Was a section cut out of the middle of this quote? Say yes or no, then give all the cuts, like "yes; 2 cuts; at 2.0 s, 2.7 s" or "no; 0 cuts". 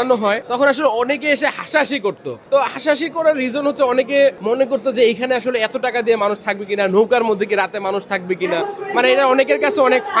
no; 0 cuts